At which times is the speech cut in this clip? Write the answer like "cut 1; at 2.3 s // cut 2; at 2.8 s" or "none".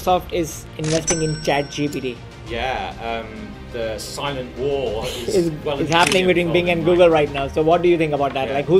none